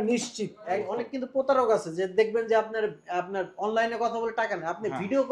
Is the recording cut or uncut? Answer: cut